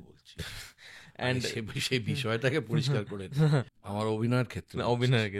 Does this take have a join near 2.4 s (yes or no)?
no